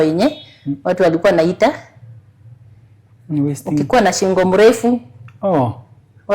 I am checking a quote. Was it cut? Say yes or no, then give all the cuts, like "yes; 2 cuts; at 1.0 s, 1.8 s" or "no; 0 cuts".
no; 0 cuts